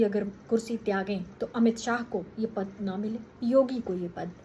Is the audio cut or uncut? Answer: cut